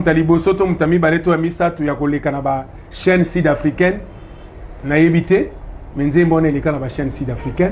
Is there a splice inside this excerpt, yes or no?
no